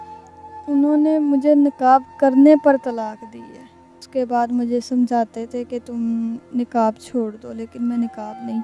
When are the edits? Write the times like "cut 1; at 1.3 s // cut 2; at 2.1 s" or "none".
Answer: cut 1; at 4.1 s